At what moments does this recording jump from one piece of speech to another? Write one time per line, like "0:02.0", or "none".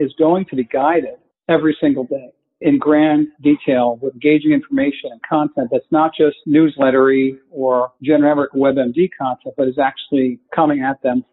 none